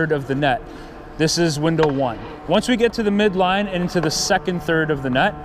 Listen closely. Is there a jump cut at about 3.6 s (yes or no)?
no